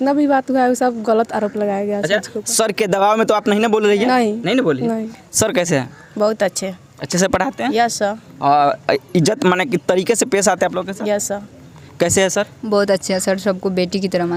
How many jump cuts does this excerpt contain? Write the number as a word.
zero